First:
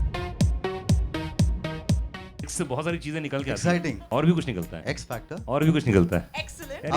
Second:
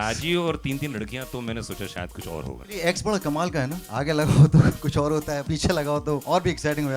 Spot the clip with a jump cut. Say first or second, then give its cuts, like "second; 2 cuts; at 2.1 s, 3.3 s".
first; 1 cut; at 2.2 s